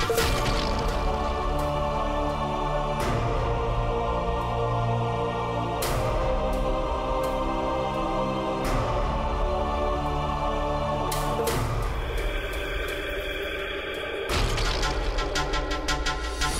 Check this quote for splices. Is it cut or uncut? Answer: uncut